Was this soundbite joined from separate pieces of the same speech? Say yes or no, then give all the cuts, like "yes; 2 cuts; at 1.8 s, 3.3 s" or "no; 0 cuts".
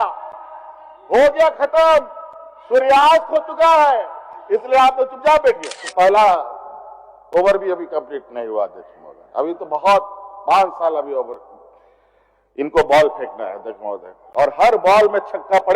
yes; 1 cut; at 5.8 s